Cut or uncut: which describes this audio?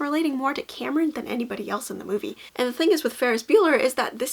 cut